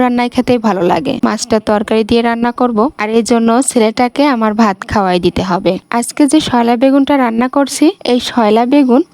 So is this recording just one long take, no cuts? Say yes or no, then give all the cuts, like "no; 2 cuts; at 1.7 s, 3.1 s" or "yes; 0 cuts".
no; 2 cuts; at 1.2 s, 5.8 s